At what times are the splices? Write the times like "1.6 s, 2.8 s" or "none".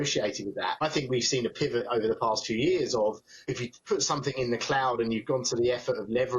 0.8 s, 3.5 s